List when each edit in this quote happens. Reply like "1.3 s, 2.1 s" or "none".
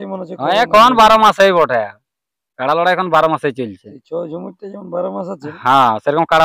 none

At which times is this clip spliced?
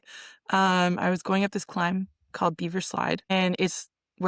3.3 s

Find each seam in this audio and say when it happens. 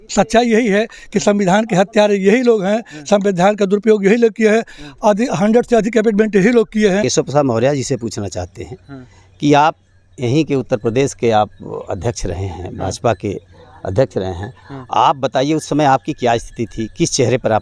7.0 s

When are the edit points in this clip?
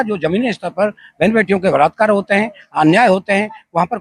none

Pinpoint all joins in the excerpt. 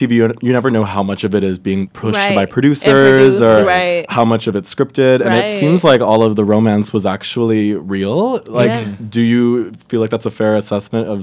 1.9 s

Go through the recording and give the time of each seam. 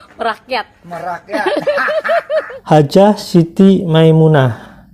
2.5 s

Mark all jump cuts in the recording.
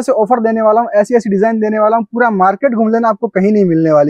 none

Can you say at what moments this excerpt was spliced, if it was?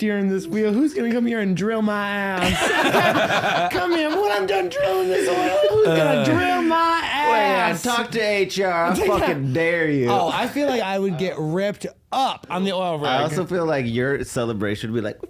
none

